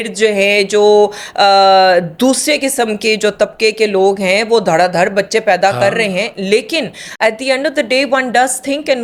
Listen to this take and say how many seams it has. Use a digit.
0